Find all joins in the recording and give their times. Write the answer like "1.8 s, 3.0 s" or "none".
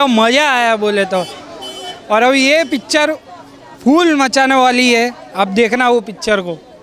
none